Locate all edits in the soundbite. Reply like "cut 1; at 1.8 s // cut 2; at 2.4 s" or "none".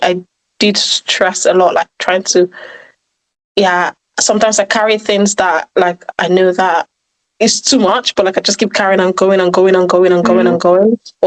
none